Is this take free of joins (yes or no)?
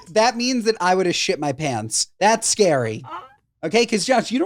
yes